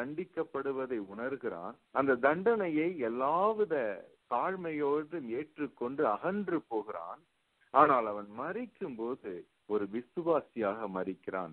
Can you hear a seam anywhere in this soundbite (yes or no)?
yes